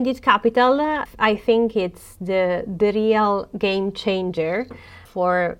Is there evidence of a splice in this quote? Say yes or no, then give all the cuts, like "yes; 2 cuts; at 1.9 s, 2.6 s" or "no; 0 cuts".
yes; 1 cut; at 1.0 s